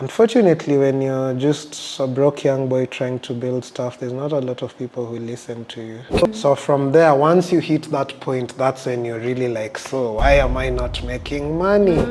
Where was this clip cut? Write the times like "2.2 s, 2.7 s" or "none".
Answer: 6.3 s